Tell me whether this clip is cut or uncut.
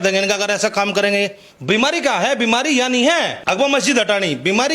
cut